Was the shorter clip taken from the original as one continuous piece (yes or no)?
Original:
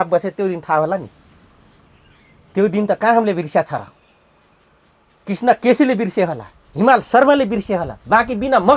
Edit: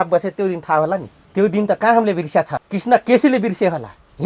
no